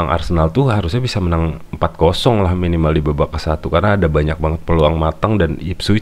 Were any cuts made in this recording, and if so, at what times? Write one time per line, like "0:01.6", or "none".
none